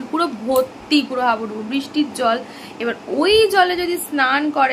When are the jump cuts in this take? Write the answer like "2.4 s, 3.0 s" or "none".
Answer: none